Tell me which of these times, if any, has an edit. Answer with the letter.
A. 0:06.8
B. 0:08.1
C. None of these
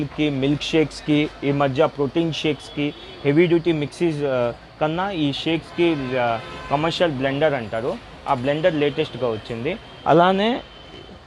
C